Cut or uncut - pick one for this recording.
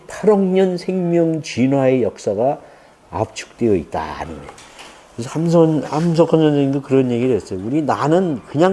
uncut